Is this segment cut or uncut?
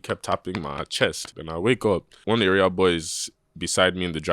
cut